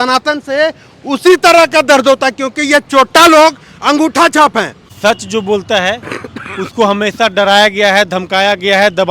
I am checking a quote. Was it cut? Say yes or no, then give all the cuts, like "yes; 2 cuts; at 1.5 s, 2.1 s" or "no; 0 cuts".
yes; 1 cut; at 4.9 s